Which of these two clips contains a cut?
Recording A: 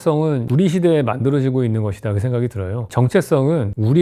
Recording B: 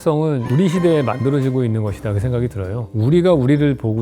B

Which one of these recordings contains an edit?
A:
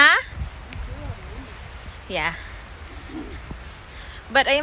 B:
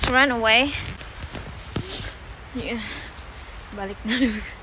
B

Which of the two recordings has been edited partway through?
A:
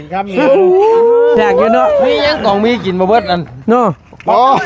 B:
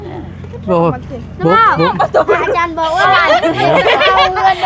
A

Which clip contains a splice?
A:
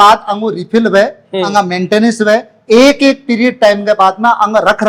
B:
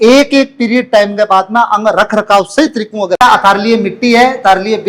B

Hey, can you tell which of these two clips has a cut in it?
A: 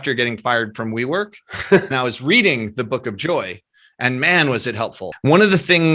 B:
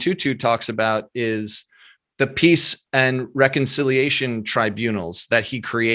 A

